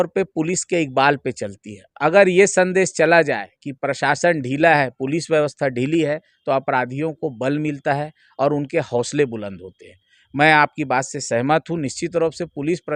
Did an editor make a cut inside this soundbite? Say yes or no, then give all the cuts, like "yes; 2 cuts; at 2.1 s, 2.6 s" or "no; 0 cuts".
no; 0 cuts